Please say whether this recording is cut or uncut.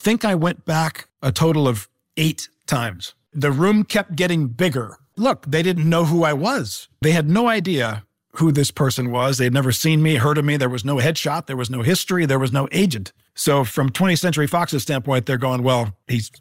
cut